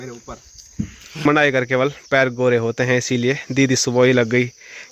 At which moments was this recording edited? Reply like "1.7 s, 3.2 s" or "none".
1.2 s